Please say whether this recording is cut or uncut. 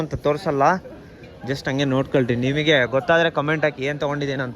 uncut